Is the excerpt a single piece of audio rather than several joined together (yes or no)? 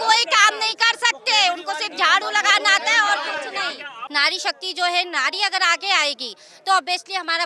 no